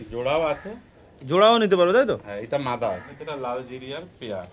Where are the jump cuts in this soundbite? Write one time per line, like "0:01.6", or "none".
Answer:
0:03.2